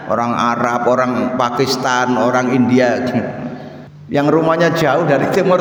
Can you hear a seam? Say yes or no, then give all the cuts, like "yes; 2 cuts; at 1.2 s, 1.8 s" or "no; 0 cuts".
no; 0 cuts